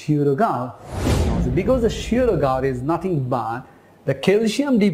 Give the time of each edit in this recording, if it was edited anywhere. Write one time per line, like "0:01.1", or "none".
0:01.2